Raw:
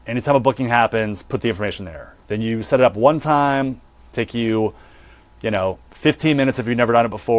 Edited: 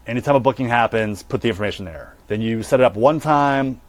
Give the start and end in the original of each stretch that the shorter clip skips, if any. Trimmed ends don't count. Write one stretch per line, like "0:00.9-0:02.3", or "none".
none

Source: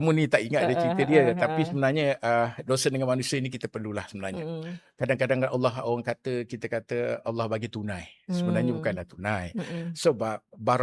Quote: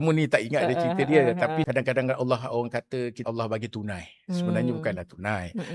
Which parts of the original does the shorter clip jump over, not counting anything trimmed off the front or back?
0:01.7-0:05.0
0:06.5-0:07.2

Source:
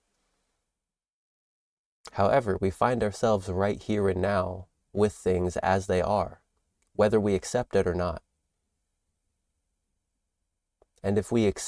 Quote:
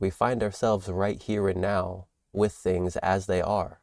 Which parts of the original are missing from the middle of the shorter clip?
none

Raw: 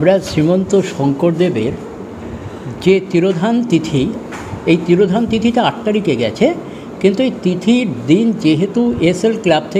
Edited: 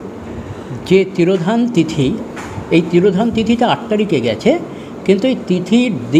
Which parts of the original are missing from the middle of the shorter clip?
none

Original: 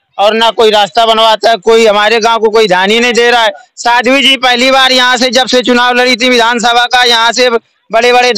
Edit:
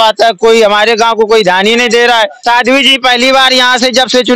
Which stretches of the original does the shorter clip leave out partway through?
0:03.6-0:03.8

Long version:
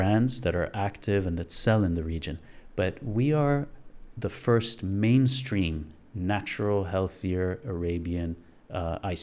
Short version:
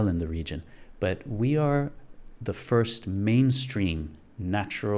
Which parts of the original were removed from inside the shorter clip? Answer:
none

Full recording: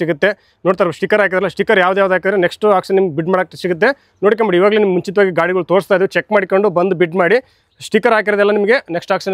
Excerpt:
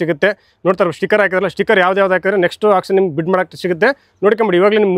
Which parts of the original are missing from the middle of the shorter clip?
none

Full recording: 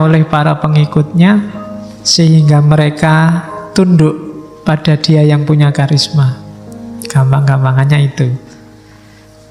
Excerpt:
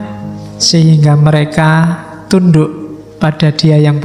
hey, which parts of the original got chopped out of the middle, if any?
none

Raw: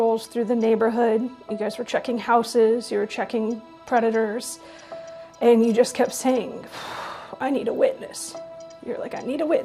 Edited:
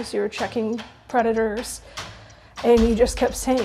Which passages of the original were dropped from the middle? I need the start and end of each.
none

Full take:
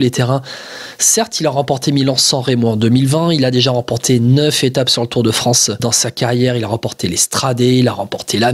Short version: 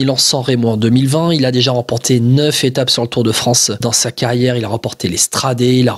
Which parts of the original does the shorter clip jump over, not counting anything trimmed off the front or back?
none

